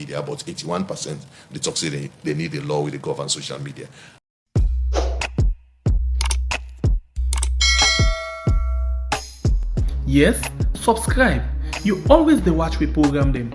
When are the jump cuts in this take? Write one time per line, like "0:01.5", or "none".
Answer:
0:04.1